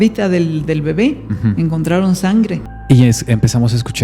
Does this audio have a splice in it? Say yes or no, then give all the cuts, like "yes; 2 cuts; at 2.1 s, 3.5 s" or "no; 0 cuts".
yes; 1 cut; at 2.6 s